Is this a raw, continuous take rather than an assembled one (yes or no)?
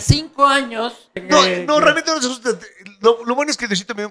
no